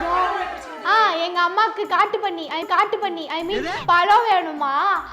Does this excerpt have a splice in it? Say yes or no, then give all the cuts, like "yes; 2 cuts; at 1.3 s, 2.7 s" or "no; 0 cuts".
yes; 1 cut; at 2.6 s